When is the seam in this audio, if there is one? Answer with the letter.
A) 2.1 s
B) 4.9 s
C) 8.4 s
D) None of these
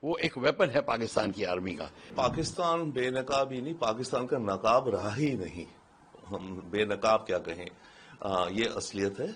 A